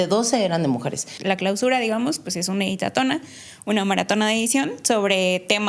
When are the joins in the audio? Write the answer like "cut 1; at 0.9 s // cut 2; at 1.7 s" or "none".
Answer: cut 1; at 1.1 s

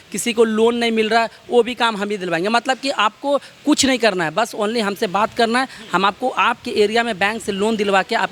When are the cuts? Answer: none

